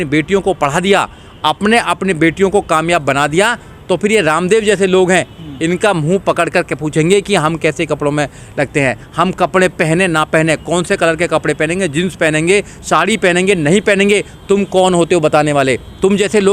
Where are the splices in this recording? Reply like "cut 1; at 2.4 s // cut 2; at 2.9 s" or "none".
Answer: none